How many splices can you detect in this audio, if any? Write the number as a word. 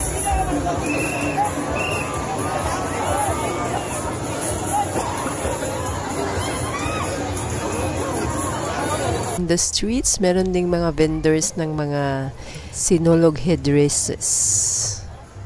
one